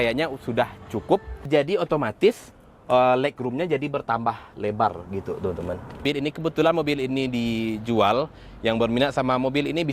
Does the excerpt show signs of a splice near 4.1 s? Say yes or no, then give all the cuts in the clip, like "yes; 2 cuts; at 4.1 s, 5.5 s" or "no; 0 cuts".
no; 2 cuts; at 1.4 s, 6.0 s